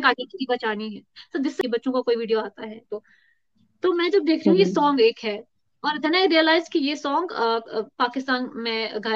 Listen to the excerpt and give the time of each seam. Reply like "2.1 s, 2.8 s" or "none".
1.6 s